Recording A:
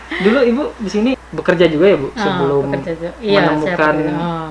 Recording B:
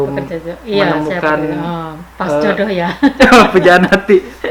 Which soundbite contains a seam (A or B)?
A